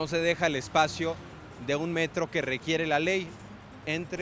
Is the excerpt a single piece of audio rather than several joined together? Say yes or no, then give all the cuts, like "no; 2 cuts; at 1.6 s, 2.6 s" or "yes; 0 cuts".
yes; 0 cuts